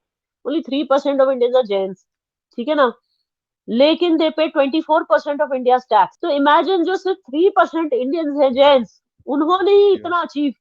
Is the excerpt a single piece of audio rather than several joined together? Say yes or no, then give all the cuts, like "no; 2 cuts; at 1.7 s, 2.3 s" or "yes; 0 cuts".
no; 1 cut; at 6.2 s